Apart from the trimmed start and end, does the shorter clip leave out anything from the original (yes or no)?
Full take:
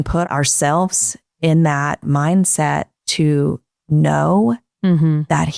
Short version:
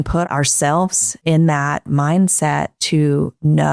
yes